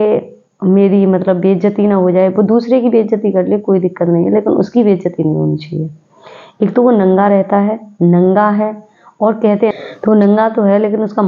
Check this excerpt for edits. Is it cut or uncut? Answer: cut